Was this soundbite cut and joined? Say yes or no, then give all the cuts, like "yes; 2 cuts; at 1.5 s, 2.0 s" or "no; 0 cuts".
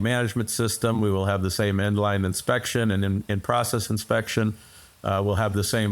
no; 0 cuts